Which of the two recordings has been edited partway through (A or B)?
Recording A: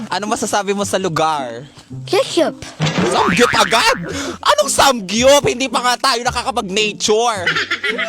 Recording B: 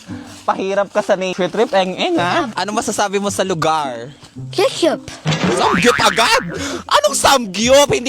B